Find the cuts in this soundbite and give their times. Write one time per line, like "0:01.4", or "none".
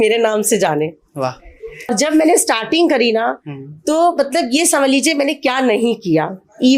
0:01.9